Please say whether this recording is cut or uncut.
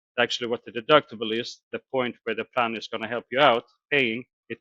uncut